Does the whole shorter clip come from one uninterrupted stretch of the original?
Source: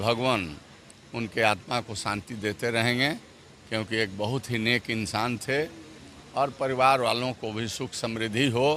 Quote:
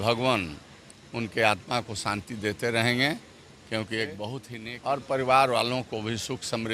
no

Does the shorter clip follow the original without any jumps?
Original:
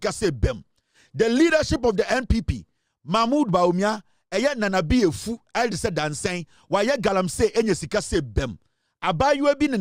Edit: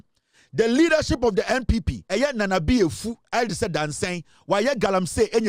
no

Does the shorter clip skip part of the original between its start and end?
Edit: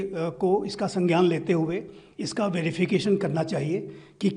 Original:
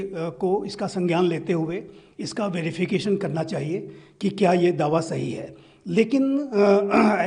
no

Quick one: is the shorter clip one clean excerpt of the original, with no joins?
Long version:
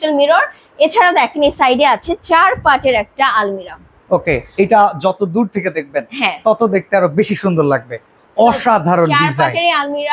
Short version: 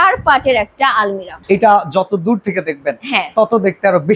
no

